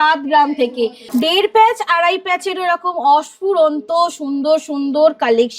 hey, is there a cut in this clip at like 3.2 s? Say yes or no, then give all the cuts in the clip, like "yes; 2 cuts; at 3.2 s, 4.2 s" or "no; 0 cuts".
no; 1 cut; at 1.0 s